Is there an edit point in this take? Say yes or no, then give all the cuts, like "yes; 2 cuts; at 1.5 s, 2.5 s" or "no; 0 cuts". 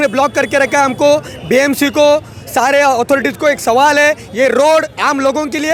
no; 0 cuts